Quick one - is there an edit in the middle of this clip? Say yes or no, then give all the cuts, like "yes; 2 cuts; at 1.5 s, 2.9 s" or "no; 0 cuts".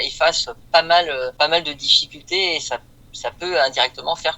yes; 1 cut; at 1.3 s